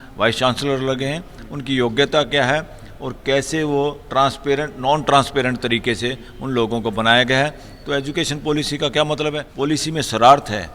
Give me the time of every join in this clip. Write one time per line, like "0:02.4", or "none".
0:09.5